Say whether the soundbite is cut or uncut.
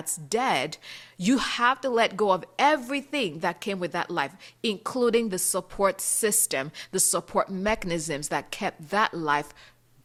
uncut